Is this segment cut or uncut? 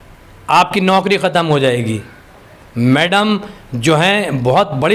uncut